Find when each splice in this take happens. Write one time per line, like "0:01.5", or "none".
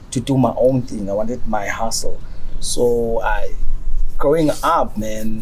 none